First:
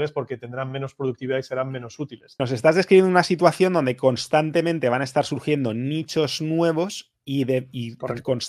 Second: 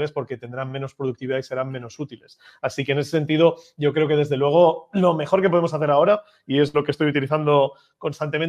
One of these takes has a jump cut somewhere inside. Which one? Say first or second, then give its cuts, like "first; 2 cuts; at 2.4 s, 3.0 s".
first; 1 cut; at 2.4 s